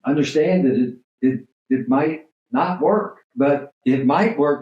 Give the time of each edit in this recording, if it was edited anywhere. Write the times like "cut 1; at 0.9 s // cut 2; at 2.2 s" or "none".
cut 1; at 3.7 s